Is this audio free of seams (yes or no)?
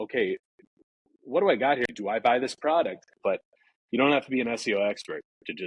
no